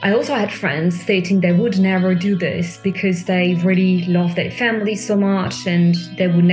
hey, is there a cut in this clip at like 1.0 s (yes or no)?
yes